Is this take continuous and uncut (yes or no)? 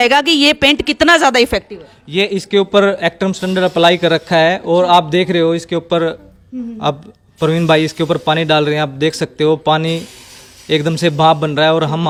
yes